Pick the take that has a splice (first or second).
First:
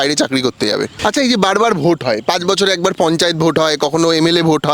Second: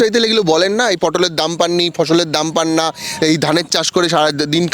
first